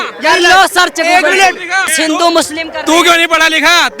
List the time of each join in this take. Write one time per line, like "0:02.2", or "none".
0:01.9